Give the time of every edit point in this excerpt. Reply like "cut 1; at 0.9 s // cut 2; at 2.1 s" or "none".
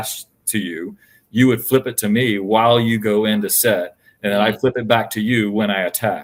none